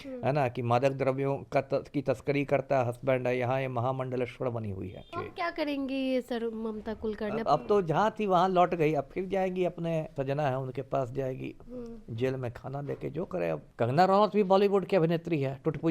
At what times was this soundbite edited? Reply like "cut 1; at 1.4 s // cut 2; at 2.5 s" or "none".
cut 1; at 5.0 s // cut 2; at 7.5 s // cut 3; at 10.2 s // cut 4; at 13.6 s